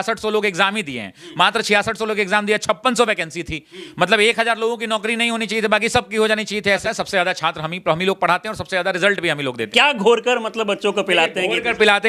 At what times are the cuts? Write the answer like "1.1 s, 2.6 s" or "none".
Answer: 6.8 s, 9.6 s